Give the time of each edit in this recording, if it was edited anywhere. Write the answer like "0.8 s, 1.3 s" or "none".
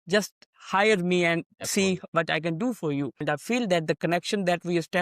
3.2 s